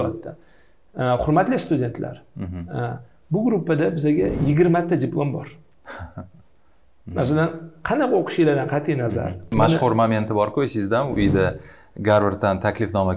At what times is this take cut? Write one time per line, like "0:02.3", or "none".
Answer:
0:09.5